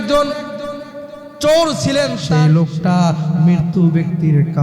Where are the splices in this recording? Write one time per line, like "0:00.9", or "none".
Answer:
0:02.2